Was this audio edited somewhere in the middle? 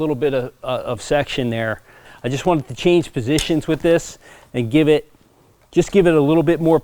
yes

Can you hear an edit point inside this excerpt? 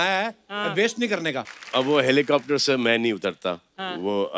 yes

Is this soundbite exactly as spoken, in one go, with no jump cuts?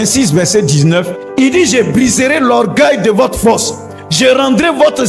yes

